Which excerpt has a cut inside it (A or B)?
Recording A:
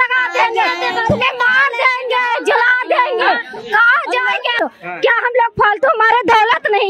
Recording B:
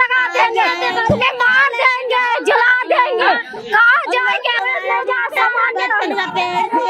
A